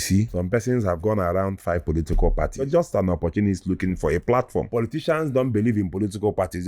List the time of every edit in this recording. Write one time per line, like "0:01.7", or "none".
0:00.9
0:02.7
0:04.7